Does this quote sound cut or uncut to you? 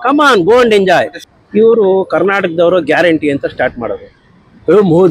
cut